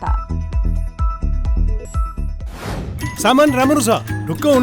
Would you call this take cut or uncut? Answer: cut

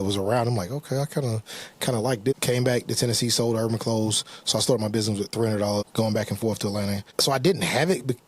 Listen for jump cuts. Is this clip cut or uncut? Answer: cut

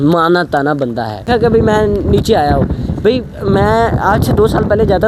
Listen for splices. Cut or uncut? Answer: cut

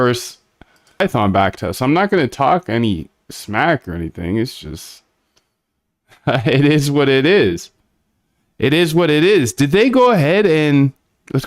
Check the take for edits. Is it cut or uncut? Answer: cut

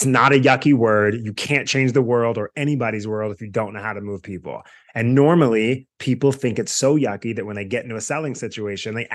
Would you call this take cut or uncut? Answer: uncut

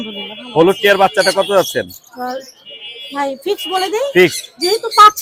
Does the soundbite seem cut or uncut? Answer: uncut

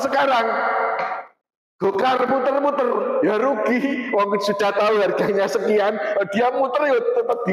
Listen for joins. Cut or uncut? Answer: uncut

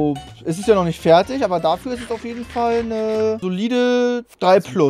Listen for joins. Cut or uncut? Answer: cut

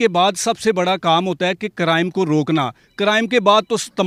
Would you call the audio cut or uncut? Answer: uncut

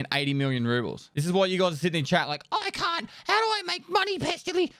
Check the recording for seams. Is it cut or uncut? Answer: uncut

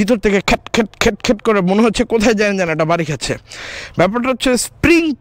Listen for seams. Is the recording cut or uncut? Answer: uncut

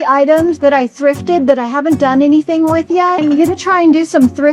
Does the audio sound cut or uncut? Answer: cut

